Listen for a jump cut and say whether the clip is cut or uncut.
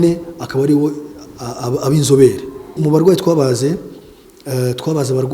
cut